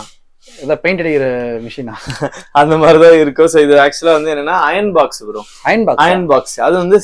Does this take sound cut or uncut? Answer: uncut